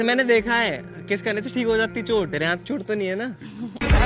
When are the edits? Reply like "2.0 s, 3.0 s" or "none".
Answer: 2.3 s